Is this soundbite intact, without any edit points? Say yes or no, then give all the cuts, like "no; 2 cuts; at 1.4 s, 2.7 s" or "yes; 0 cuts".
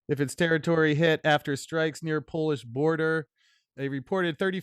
no; 1 cut; at 3.7 s